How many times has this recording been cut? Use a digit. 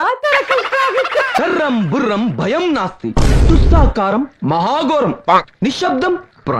1